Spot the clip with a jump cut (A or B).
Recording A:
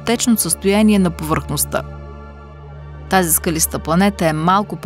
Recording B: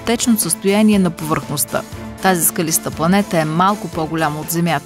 B